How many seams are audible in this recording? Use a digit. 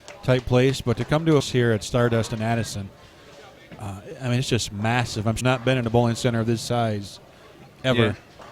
2